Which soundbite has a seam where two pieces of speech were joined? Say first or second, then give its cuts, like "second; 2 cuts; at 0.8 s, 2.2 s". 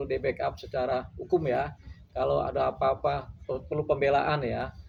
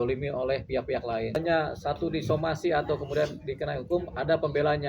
second; 1 cut; at 1.3 s